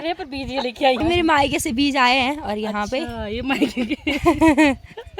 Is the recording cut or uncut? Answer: cut